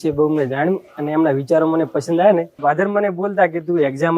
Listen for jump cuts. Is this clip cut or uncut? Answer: cut